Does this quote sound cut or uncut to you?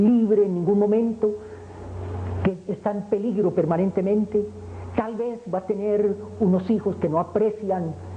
cut